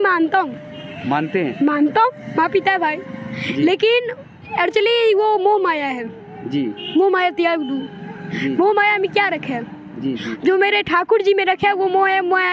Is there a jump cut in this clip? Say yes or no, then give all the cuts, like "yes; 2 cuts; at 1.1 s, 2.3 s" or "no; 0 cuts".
no; 0 cuts